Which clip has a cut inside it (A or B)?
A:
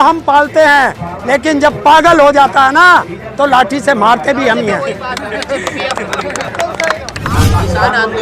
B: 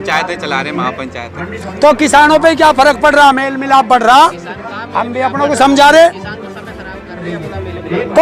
A